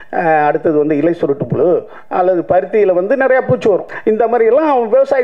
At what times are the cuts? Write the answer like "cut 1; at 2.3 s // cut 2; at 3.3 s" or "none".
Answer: cut 1; at 3.9 s